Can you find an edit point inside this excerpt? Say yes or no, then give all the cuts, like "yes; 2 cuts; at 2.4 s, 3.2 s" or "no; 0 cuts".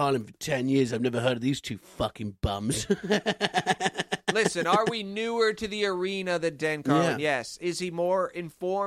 no; 0 cuts